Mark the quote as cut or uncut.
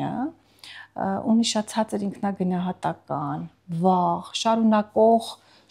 uncut